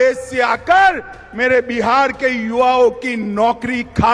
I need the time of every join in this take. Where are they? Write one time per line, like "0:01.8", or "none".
none